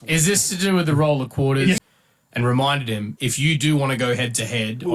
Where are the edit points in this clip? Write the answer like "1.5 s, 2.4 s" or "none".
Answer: 2.0 s